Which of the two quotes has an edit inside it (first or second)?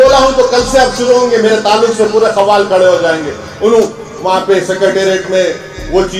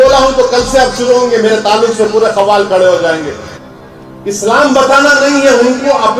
second